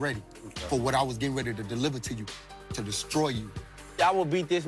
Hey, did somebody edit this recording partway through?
yes; 2 cuts; at 2.3 s, 4.0 s

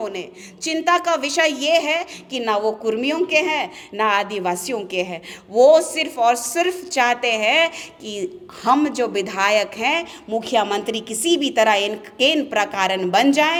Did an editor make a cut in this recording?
no; 0 cuts

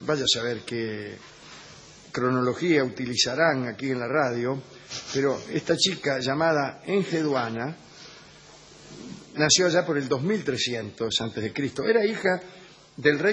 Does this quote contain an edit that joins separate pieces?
yes; 1 cut; at 3.6 s

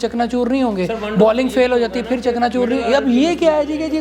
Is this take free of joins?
yes; 0 cuts

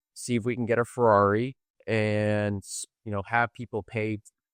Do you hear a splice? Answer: no; 0 cuts

